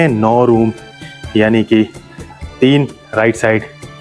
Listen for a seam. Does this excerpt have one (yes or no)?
no